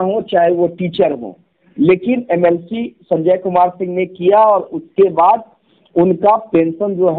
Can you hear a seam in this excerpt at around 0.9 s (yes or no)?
no